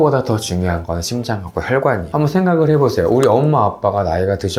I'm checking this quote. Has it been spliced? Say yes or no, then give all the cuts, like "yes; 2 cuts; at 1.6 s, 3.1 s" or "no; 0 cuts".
yes; 1 cut; at 2.1 s